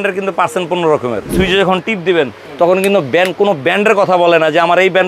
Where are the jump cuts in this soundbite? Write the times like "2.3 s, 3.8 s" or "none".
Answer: 1.3 s